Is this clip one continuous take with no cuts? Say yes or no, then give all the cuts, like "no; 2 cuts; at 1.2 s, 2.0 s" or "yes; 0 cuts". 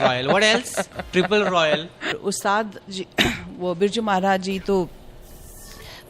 no; 1 cut; at 2.1 s